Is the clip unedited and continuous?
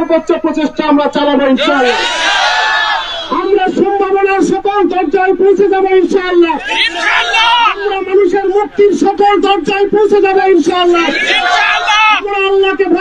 yes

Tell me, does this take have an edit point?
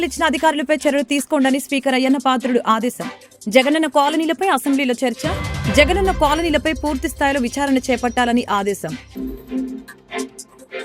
yes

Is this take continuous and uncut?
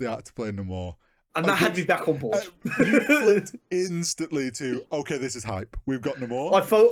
yes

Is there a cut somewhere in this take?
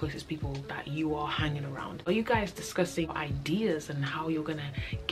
yes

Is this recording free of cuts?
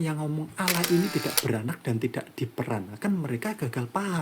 yes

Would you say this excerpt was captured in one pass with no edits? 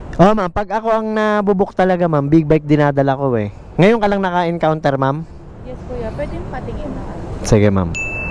no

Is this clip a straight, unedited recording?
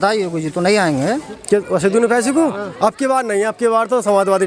no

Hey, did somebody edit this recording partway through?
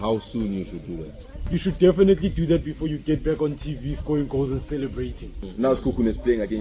yes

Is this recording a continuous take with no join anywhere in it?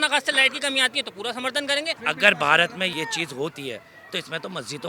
no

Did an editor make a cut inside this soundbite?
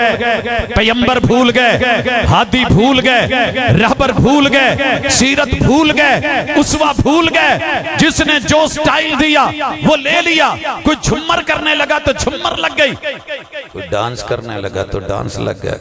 no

